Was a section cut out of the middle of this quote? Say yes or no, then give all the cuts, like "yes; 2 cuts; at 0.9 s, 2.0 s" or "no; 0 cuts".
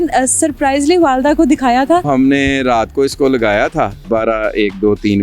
yes; 2 cuts; at 2.1 s, 4.0 s